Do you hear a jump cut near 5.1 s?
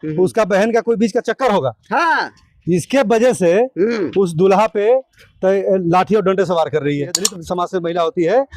no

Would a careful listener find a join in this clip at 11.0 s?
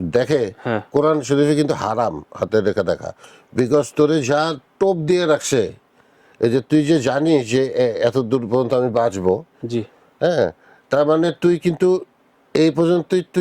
no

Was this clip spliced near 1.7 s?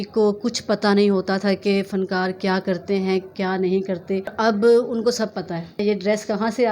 no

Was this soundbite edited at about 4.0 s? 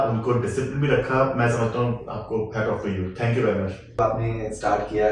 yes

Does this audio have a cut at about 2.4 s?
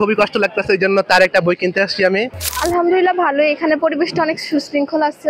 yes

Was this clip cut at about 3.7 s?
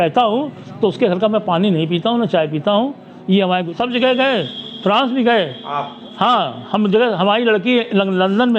yes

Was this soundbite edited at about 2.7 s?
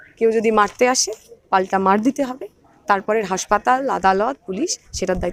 no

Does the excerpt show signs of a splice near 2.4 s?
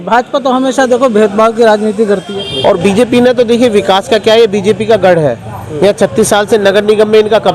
yes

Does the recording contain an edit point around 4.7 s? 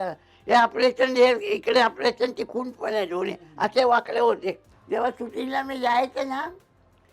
yes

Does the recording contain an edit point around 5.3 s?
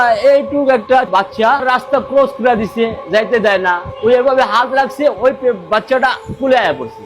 no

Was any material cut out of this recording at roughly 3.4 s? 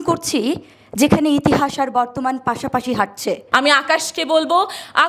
yes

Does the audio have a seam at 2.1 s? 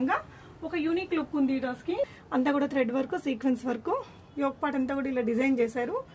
yes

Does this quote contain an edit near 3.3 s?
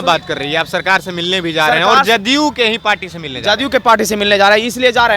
no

